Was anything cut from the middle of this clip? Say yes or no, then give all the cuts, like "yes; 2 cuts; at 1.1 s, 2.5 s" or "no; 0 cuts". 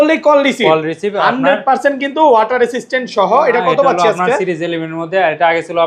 no; 0 cuts